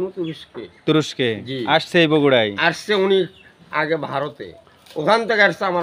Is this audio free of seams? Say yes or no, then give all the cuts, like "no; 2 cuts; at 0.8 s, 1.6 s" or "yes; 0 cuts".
yes; 0 cuts